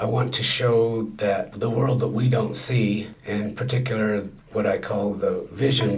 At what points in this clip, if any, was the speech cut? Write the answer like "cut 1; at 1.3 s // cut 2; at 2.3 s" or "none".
none